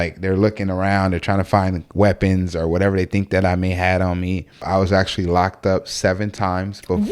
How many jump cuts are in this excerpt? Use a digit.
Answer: 1